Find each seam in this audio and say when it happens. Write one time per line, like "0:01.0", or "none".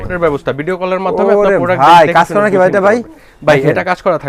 none